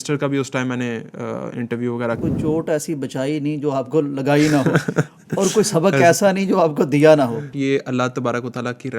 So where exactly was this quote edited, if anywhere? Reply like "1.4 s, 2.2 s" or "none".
2.2 s, 7.5 s